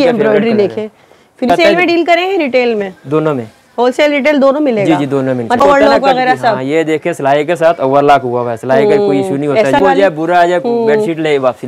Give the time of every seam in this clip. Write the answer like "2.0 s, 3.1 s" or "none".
1.5 s, 5.6 s, 9.8 s